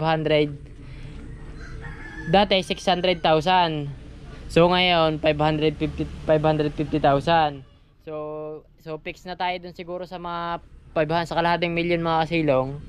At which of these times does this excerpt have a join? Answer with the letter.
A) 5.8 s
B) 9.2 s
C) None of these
C